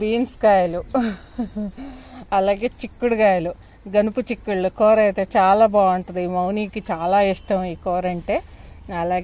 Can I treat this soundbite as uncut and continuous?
yes; 0 cuts

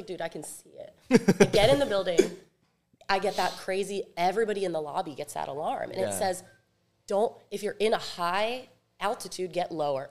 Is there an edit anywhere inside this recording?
no; 0 cuts

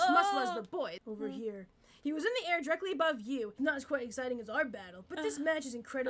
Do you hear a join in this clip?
yes; 2 cuts; at 1.0 s, 3.5 s

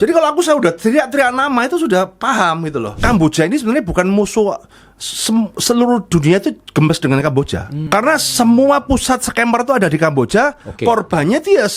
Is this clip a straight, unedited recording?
no; 2 cuts; at 2.9 s, 7.7 s

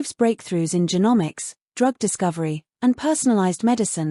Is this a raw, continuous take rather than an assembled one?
yes; 0 cuts

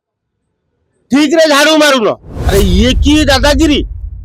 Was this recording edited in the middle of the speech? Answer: yes; 1 cut; at 2.3 s

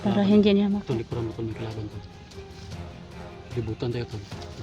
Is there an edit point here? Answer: yes; 2 cuts; at 2.0 s, 3.6 s

